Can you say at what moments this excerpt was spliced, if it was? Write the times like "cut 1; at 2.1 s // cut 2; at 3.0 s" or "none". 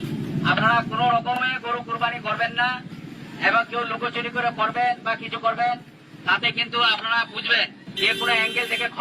cut 1; at 7.8 s

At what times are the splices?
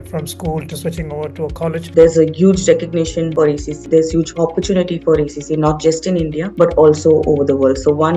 cut 1; at 1.9 s // cut 2; at 3.5 s // cut 3; at 6.4 s

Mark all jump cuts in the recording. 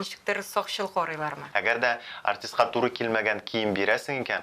cut 1; at 1.4 s

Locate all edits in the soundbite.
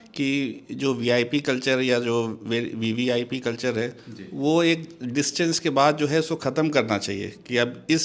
none

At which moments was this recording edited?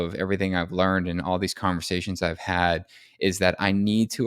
none

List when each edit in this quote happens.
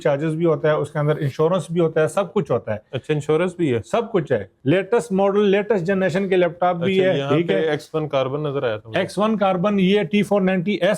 cut 1; at 4.5 s

